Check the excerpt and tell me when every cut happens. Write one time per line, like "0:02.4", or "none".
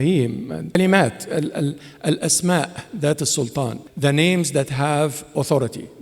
0:00.8
0:03.8

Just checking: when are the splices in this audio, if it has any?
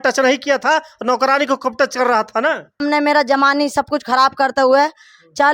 0:02.8

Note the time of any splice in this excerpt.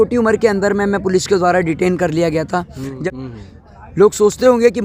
0:03.0

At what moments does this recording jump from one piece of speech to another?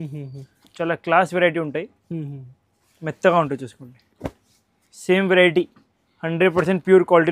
none

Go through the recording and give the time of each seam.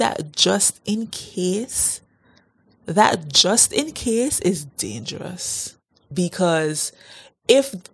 0:06.0

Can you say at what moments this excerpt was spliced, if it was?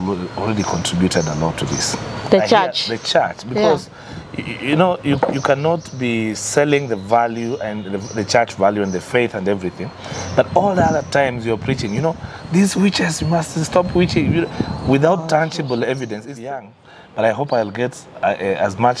0:16.5

